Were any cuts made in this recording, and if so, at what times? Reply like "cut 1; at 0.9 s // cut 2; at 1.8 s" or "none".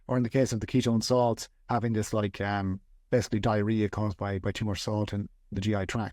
none

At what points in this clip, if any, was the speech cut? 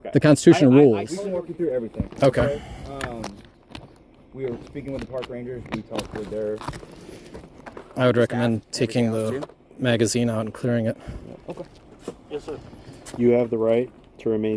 cut 1; at 1.3 s // cut 2; at 11.8 s

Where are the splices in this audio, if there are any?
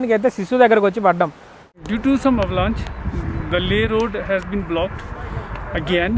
cut 1; at 1.7 s

